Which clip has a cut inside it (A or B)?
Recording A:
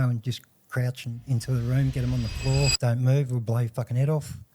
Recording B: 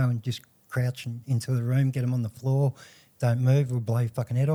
A